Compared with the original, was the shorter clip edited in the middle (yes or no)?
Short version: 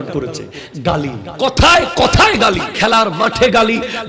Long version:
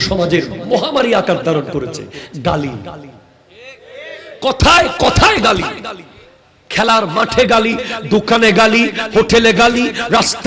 yes